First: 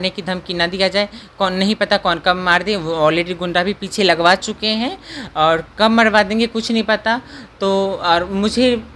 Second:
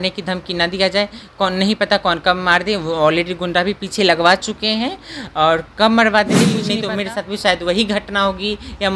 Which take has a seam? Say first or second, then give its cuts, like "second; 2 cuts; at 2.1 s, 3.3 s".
second; 1 cut; at 6.7 s